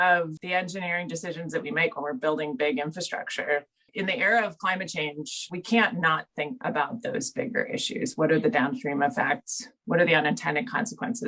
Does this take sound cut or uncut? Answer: uncut